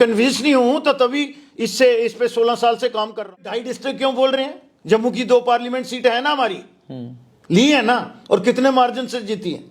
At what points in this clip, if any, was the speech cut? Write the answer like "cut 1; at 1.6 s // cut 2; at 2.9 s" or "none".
cut 1; at 3.5 s